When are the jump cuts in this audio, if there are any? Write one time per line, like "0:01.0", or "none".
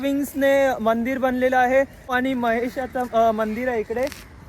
0:02.2